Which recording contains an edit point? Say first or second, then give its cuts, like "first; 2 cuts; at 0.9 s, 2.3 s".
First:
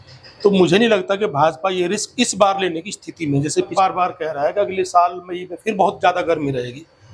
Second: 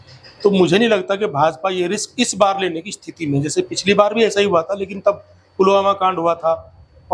first; 1 cut; at 3.7 s